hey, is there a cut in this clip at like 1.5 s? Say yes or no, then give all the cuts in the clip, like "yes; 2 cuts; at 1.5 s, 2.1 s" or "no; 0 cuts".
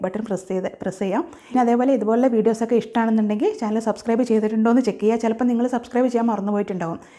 yes; 1 cut; at 1.5 s